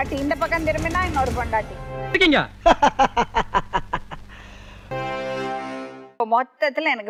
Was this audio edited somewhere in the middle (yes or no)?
no